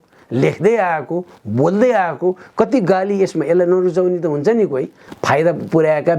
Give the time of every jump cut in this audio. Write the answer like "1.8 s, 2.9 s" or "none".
5.0 s